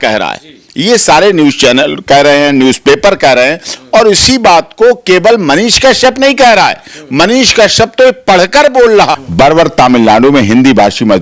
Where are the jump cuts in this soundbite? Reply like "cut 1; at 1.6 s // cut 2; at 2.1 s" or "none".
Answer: cut 1; at 9.2 s